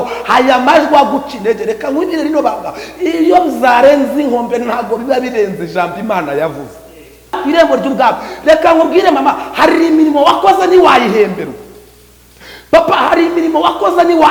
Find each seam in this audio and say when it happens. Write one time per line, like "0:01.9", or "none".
0:07.4